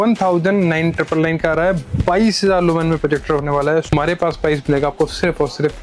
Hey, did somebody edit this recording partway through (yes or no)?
yes